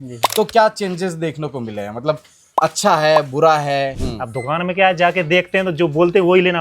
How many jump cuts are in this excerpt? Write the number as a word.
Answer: one